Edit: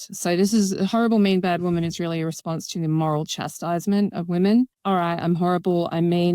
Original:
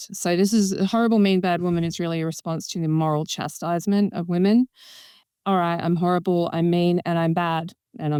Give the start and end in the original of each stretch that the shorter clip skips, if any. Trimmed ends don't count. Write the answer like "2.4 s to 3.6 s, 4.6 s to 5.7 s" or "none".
4.8 s to 5.4 s